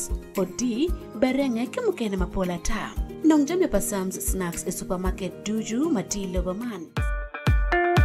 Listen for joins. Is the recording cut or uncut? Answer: cut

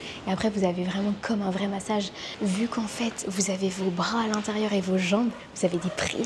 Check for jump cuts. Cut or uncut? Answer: uncut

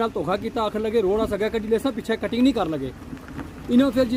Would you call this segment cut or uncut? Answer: uncut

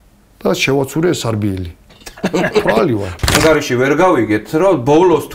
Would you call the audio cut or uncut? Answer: cut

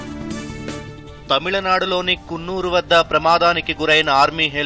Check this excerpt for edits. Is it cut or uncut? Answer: cut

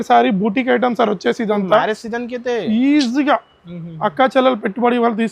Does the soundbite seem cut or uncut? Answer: uncut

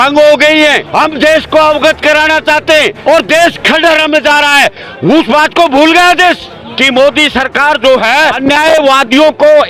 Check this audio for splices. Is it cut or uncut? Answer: cut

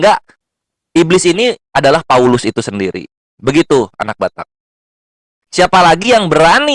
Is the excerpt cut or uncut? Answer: uncut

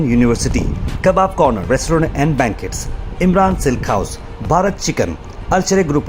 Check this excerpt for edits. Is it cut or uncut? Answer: uncut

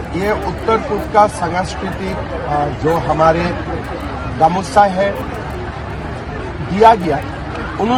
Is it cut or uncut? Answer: uncut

